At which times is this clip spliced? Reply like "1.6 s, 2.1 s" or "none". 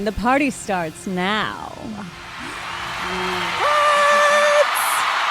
1.8 s